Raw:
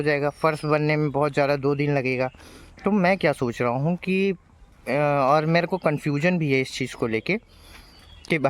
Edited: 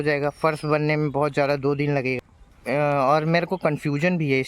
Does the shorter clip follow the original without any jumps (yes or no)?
no